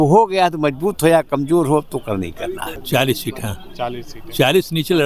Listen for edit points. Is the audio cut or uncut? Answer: cut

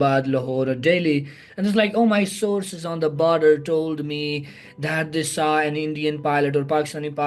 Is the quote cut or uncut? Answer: uncut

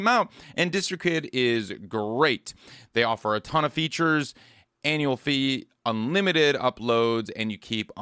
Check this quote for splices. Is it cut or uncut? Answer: uncut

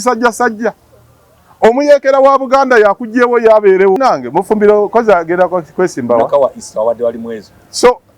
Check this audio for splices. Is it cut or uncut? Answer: cut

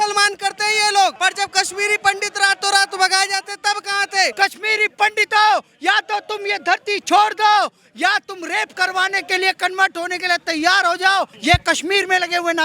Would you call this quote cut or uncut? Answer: cut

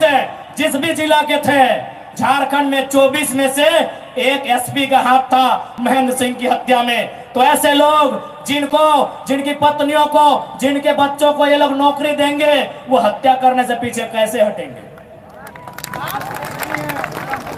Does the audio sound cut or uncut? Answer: uncut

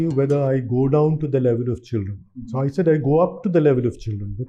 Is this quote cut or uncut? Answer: uncut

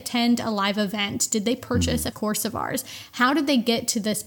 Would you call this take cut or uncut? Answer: cut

